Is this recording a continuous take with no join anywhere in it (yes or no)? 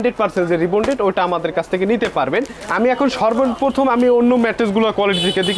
yes